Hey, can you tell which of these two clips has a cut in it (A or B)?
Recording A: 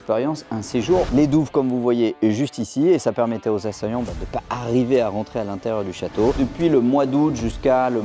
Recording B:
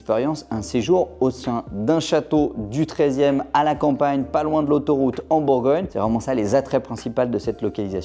A